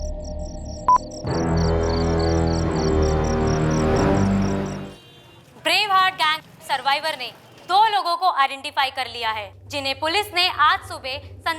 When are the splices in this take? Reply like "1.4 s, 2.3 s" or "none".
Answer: 4.7 s